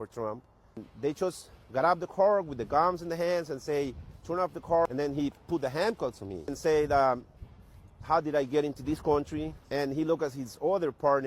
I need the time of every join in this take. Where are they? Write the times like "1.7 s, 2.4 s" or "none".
0.9 s, 4.9 s, 6.6 s, 9.6 s